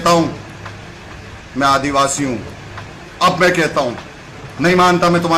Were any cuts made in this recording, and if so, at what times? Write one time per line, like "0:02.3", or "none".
none